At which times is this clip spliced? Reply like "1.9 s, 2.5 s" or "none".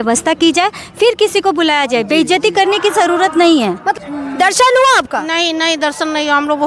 3.9 s